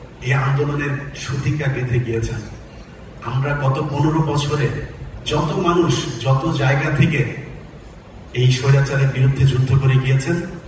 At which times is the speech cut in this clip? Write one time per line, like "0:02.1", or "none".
none